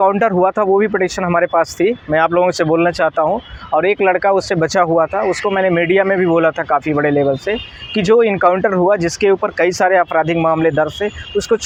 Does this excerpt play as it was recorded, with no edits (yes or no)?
yes